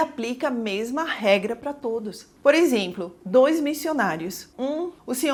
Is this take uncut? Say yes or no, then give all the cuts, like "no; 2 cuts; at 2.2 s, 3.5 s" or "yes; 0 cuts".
yes; 0 cuts